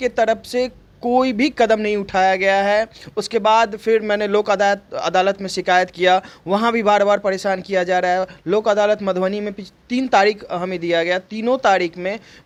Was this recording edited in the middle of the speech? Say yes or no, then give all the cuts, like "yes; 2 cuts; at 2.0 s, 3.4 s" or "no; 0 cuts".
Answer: no; 0 cuts